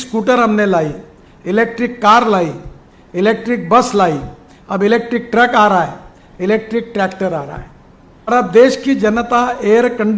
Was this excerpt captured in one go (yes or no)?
no